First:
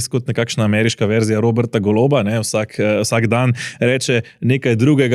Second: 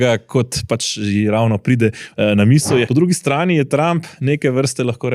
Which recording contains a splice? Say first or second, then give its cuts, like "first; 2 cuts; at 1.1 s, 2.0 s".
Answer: second; 1 cut; at 2.9 s